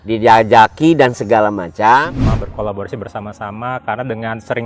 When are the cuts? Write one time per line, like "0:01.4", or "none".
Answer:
0:02.0

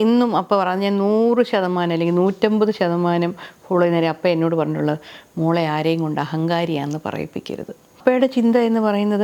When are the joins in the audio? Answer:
0:08.0

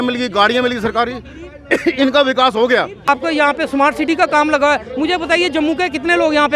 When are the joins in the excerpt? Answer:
0:03.1

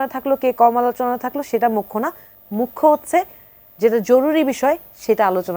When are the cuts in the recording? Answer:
none

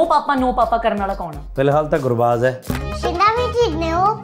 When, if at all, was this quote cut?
0:01.4

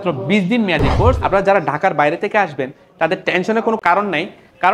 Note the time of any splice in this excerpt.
0:01.2

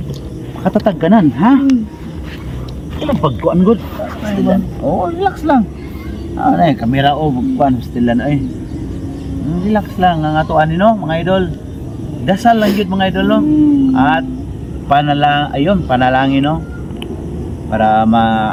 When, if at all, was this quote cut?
none

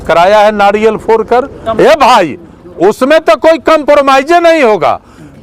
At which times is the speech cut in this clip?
0:01.6

